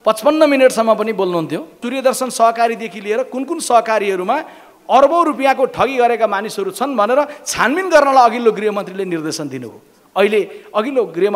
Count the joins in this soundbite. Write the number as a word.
one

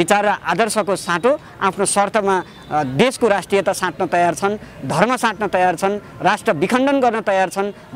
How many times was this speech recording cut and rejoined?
zero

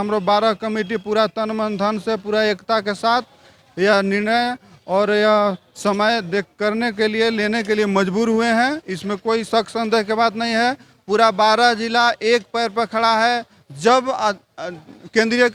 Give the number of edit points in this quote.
zero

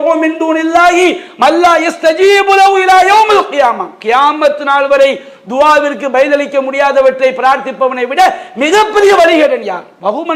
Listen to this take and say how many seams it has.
zero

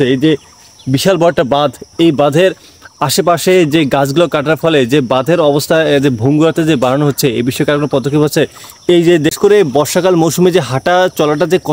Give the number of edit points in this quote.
one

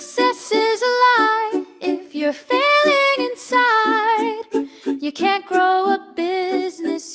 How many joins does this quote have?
zero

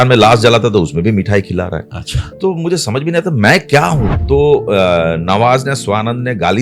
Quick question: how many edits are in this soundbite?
one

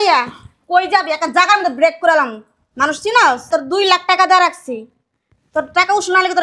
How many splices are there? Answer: one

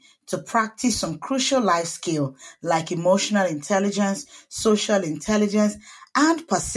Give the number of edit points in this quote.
zero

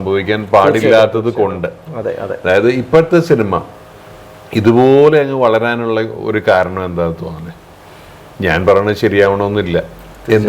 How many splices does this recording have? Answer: zero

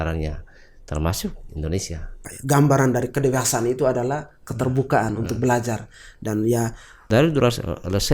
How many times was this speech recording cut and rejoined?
two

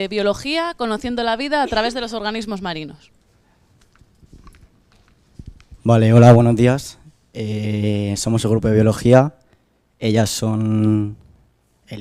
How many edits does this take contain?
zero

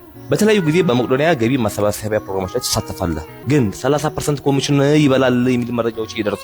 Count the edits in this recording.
one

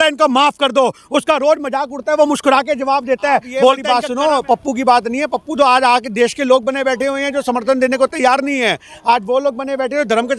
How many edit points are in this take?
one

